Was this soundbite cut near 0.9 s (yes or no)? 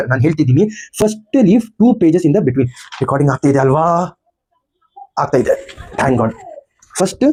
no